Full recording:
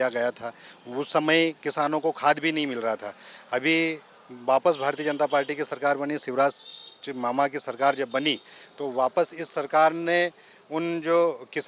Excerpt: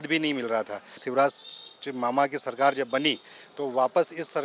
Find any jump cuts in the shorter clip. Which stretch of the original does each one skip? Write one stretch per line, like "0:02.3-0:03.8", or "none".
0:03.4-0:06.2